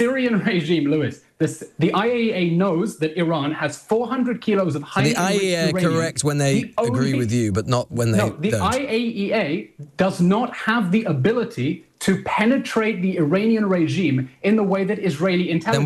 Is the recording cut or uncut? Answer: uncut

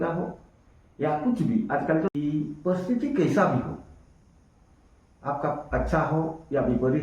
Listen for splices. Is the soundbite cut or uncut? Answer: cut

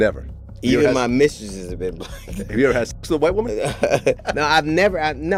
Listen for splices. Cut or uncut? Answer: uncut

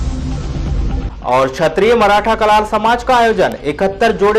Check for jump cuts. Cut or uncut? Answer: cut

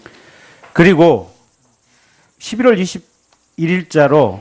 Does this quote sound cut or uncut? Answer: cut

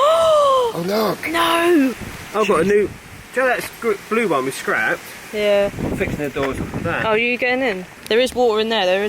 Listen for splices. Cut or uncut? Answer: uncut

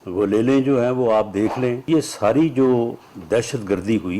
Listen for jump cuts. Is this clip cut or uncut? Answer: cut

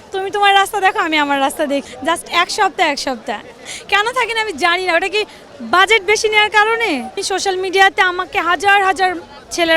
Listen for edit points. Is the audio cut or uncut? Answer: cut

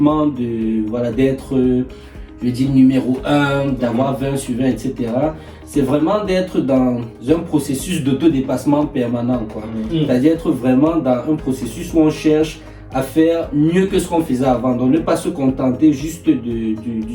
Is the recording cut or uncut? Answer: uncut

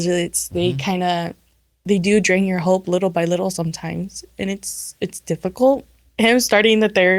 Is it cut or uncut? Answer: cut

